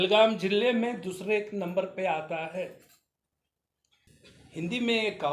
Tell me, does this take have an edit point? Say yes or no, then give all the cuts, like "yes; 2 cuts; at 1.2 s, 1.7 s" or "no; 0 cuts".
yes; 1 cut; at 4.1 s